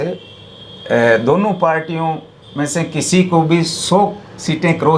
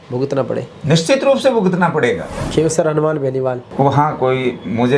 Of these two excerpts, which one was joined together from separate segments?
second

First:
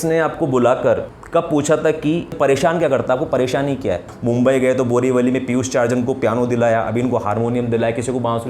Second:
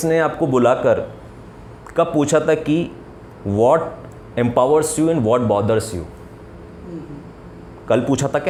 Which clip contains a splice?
first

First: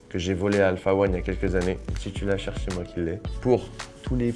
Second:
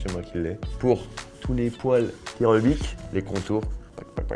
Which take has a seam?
second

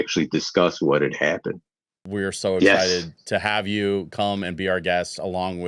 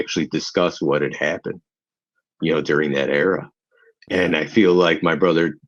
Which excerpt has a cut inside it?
first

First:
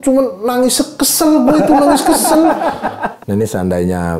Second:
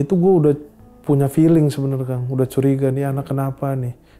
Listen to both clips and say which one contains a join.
first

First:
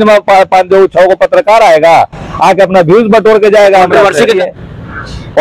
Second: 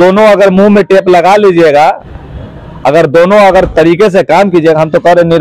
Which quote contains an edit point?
first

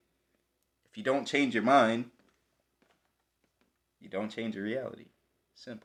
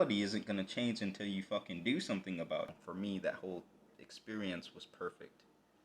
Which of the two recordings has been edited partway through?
second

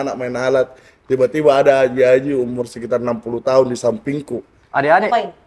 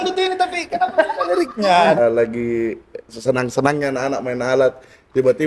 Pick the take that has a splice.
second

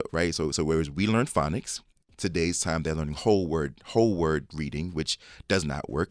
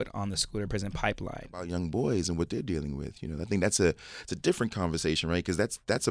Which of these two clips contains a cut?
second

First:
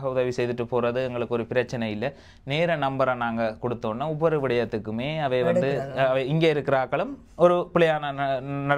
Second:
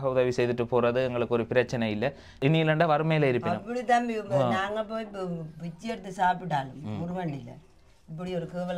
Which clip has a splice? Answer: second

